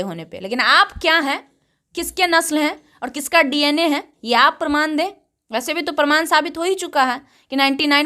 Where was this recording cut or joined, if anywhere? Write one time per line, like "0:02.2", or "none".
none